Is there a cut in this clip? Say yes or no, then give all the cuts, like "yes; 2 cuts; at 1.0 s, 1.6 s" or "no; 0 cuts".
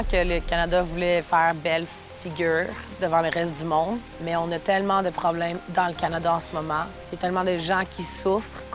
yes; 3 cuts; at 4.1 s, 5.6 s, 7.0 s